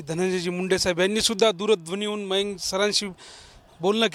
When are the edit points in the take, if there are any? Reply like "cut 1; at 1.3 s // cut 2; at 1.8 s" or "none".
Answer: none